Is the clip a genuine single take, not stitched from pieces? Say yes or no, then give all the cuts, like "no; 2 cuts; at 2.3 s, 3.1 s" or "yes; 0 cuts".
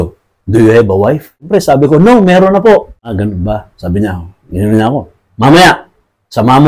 no; 2 cuts; at 1.5 s, 3.1 s